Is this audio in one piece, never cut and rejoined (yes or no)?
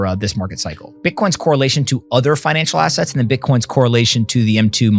no